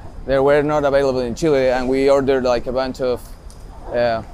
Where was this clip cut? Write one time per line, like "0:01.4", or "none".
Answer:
none

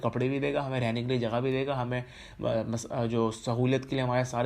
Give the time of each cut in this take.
none

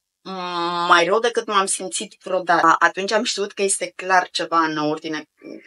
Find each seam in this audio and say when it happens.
0:02.6

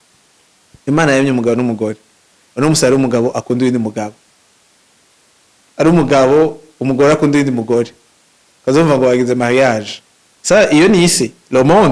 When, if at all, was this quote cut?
none

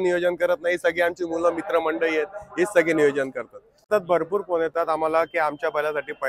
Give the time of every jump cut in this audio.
0:04.0

